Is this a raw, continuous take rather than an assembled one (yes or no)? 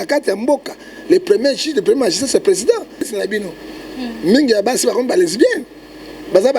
no